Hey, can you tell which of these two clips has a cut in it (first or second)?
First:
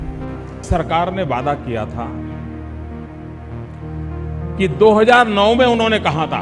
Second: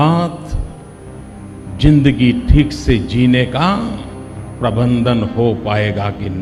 first